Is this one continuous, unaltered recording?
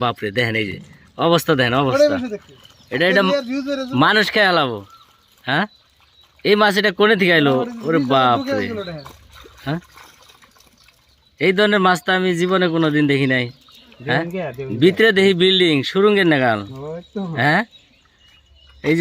yes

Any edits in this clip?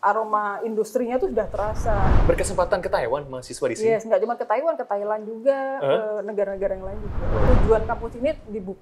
yes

